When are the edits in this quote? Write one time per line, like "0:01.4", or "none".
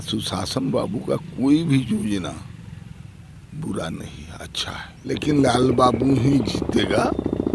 0:05.1